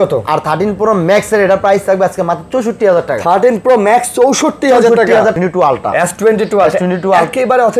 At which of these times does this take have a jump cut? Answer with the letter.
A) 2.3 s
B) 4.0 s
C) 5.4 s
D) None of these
C